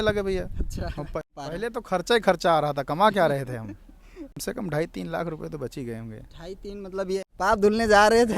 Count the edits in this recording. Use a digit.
3